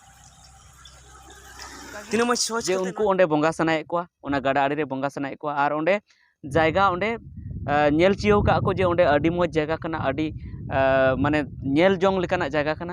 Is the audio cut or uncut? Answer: cut